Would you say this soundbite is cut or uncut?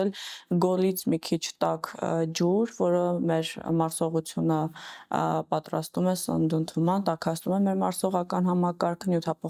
uncut